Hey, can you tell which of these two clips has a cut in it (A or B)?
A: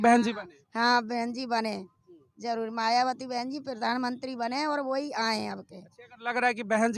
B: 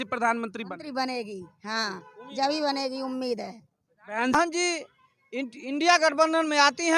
B